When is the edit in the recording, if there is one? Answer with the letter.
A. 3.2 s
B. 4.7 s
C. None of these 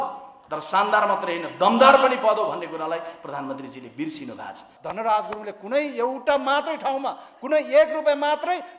B